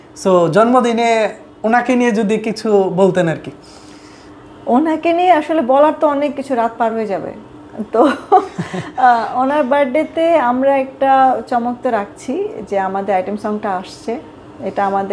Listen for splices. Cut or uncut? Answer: uncut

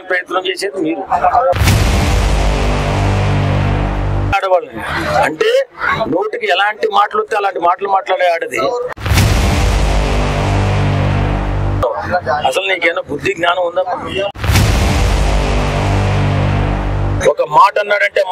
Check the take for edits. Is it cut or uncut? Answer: cut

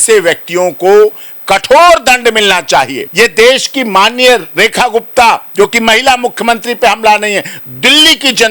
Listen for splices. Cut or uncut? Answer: cut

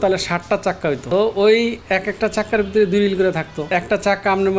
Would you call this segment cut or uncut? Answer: cut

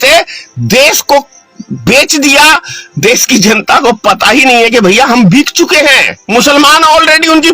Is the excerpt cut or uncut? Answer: cut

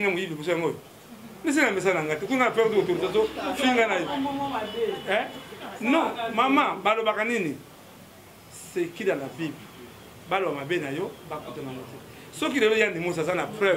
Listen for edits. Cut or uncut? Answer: uncut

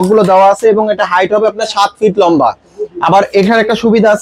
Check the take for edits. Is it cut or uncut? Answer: uncut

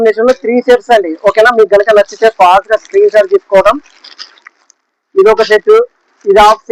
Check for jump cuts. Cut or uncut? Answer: uncut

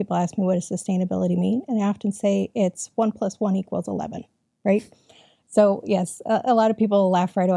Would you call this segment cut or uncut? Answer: uncut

